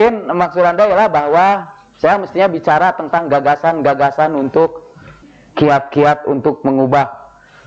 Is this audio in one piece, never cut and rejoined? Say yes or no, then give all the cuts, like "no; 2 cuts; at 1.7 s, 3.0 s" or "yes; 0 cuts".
no; 1 cut; at 5.1 s